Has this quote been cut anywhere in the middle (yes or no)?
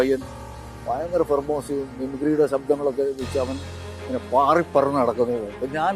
no